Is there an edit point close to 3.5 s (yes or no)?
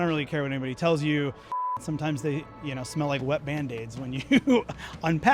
no